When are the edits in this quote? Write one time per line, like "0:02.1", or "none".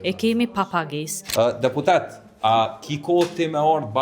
0:01.2